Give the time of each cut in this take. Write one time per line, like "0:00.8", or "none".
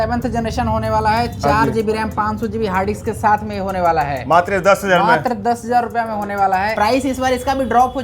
0:06.7